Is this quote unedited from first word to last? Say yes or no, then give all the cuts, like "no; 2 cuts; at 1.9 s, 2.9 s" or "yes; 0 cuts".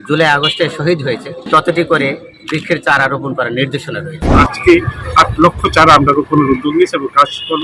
no; 2 cuts; at 1.4 s, 4.3 s